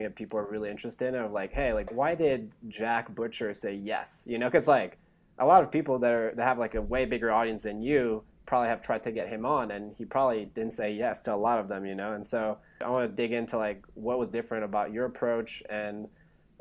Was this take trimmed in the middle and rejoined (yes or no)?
yes